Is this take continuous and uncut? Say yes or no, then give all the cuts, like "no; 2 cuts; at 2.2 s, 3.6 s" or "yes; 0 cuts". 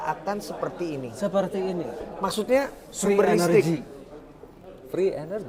yes; 0 cuts